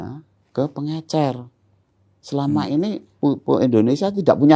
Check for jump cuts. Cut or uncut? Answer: cut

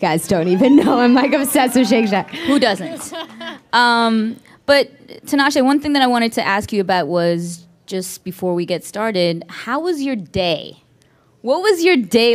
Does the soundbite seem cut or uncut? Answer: uncut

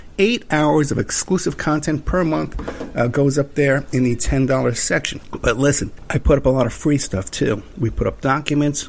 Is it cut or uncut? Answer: cut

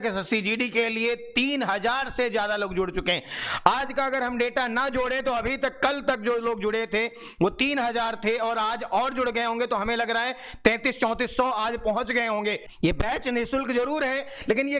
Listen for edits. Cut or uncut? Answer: cut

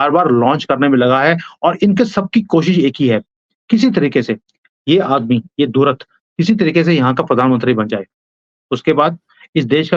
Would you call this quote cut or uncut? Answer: uncut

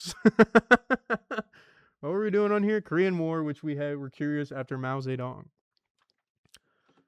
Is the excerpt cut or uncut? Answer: uncut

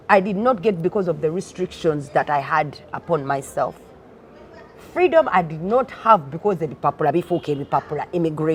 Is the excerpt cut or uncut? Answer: uncut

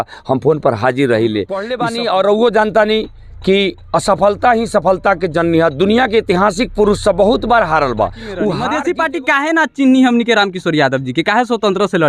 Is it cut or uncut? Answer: cut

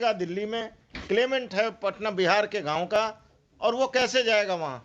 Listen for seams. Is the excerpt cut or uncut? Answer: uncut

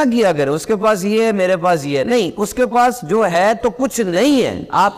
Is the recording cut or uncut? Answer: uncut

